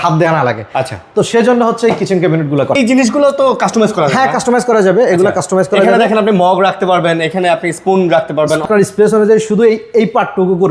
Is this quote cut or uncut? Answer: cut